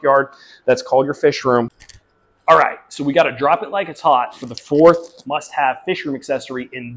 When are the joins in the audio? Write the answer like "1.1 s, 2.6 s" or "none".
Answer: 1.7 s